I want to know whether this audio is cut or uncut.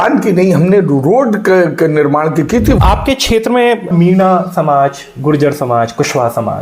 cut